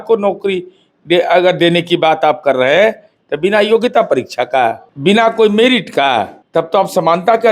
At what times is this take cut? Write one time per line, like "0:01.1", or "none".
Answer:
0:04.9
0:06.4